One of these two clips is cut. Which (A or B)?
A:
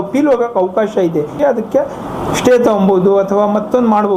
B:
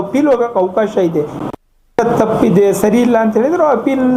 A